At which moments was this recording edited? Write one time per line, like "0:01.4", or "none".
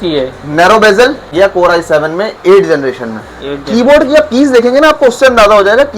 0:01.3